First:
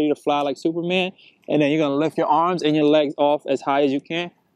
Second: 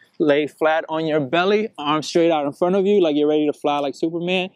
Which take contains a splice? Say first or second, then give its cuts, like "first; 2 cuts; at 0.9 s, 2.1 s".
first; 1 cut; at 2.1 s